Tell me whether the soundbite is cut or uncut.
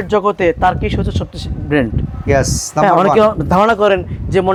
uncut